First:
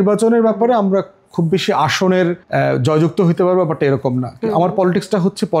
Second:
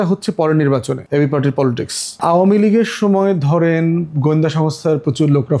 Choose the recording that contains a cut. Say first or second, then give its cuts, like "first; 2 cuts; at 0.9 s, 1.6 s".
second; 1 cut; at 2.1 s